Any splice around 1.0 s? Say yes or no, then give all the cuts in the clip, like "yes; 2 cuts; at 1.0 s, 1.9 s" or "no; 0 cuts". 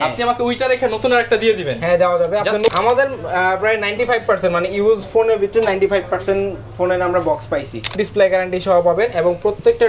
no; 2 cuts; at 2.7 s, 7.9 s